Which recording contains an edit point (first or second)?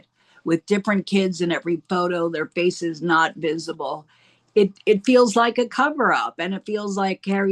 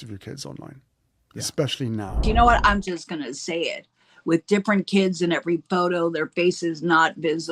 second